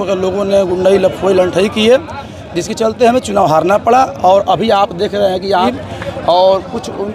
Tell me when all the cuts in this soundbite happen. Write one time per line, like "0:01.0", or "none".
0:05.7